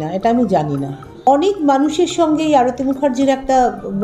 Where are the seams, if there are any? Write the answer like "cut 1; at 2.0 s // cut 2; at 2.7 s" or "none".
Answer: cut 1; at 1.3 s